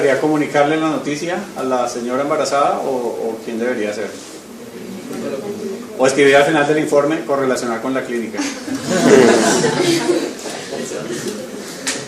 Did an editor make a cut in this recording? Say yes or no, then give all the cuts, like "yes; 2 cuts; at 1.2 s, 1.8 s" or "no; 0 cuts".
yes; 1 cut; at 10.6 s